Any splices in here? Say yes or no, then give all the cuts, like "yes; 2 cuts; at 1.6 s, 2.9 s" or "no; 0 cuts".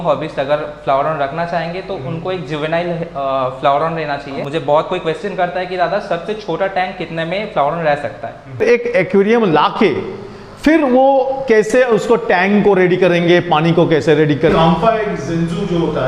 yes; 3 cuts; at 4.4 s, 8.6 s, 14.5 s